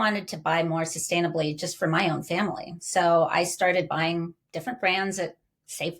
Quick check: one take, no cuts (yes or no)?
yes